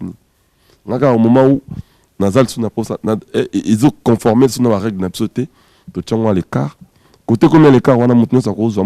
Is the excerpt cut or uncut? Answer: uncut